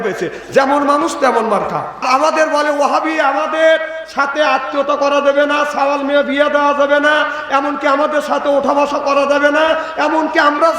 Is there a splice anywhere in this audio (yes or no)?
yes